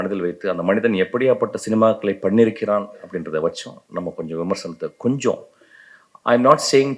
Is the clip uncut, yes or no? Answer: yes